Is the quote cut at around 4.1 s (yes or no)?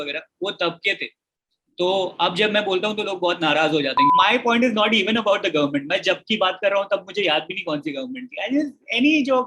yes